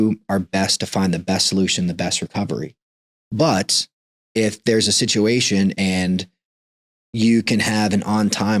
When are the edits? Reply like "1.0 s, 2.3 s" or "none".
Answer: none